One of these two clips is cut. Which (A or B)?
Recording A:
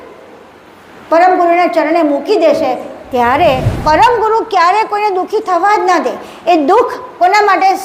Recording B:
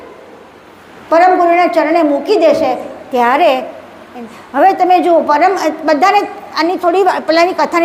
A